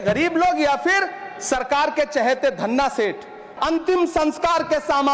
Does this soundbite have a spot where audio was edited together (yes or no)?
yes